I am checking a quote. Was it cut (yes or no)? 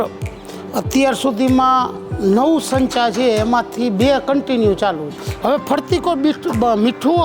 yes